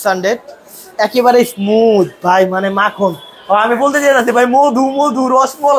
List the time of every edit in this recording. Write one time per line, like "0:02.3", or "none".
none